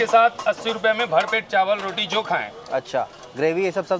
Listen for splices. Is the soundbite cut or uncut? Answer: uncut